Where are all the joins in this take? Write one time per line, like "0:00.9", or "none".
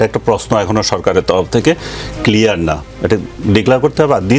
none